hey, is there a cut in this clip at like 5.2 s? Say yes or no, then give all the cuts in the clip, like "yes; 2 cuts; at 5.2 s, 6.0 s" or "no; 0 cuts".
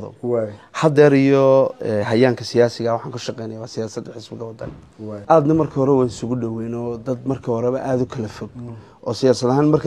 yes; 1 cut; at 5.2 s